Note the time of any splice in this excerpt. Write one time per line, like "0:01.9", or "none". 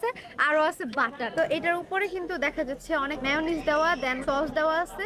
0:01.3